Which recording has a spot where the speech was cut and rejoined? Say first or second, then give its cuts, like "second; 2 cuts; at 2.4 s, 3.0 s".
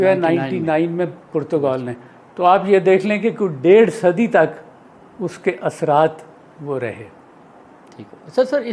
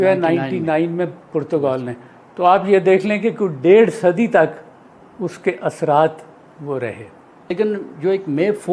second; 1 cut; at 7.5 s